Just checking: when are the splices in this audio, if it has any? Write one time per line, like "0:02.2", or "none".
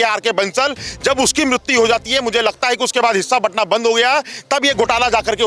none